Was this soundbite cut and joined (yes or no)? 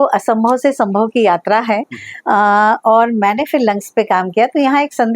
no